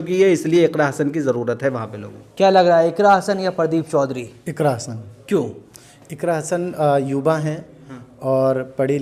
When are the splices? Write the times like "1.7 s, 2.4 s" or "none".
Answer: none